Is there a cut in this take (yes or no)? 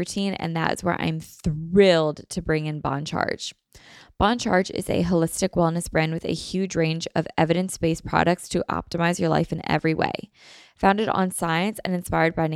no